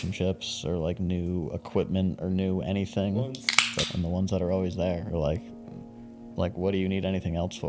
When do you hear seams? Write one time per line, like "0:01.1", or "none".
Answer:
0:03.9